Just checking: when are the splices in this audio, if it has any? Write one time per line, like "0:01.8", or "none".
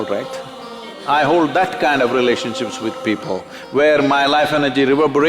0:00.9